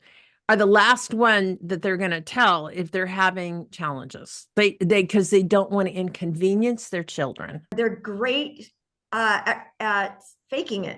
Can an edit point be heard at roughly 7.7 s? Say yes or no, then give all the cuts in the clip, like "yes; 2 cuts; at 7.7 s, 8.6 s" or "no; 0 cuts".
yes; 1 cut; at 7.7 s